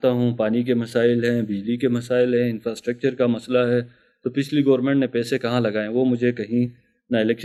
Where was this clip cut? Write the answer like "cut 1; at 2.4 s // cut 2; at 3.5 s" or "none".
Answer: none